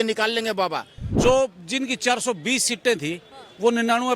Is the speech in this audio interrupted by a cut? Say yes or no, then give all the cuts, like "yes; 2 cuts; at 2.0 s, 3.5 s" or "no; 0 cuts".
yes; 1 cut; at 1.1 s